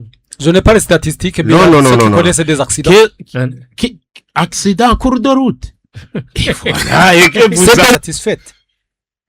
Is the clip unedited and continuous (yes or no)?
no